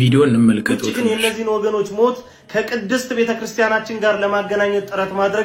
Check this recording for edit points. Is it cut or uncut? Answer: uncut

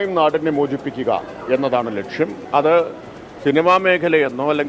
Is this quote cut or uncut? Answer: cut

